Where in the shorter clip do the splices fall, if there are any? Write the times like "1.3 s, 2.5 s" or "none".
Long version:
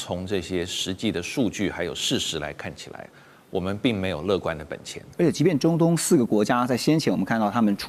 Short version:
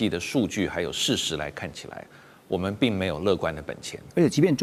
none